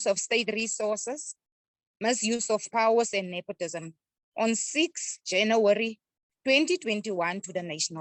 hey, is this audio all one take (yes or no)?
yes